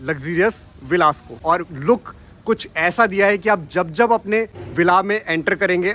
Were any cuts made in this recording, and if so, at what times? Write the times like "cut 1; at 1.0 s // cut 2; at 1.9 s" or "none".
cut 1; at 1.4 s // cut 2; at 4.6 s